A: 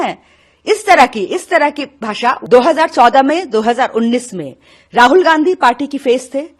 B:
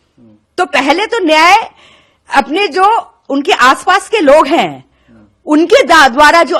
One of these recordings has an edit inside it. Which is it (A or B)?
A